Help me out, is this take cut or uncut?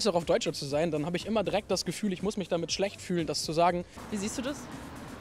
cut